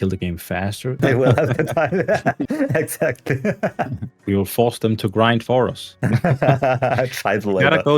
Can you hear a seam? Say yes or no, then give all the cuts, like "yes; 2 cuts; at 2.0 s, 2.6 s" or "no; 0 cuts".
yes; 2 cuts; at 1.0 s, 4.2 s